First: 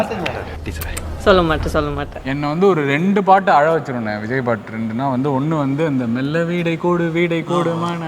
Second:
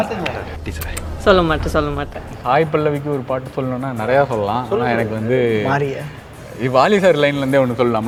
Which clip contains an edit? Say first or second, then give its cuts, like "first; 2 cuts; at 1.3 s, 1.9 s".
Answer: first; 1 cut; at 2.2 s